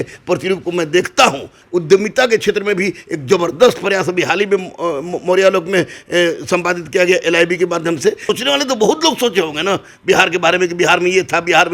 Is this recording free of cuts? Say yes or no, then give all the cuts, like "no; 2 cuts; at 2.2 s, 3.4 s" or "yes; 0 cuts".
no; 2 cuts; at 1.6 s, 8.3 s